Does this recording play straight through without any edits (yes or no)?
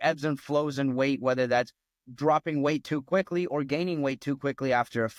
yes